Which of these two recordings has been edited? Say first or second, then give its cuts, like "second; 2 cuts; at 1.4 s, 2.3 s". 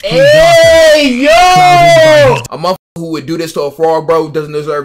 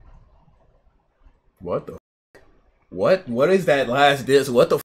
first; 1 cut; at 2.5 s